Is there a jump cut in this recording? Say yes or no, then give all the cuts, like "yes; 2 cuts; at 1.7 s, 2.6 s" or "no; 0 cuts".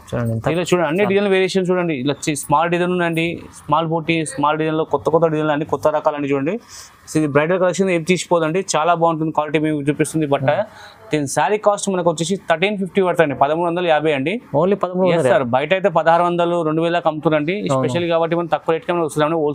no; 0 cuts